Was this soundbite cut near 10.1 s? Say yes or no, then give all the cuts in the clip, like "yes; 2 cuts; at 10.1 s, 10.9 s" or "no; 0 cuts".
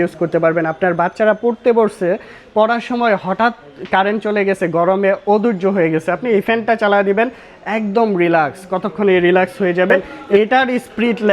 yes; 1 cut; at 10.1 s